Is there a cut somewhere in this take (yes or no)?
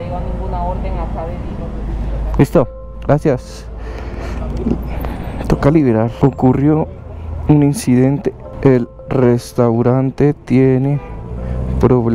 no